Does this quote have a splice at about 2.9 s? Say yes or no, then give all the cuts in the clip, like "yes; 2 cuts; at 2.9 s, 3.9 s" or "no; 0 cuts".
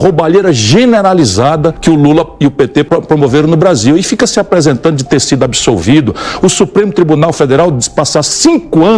yes; 2 cuts; at 1.8 s, 2.9 s